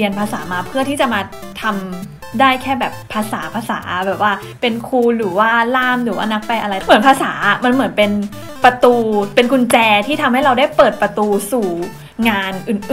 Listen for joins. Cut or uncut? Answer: cut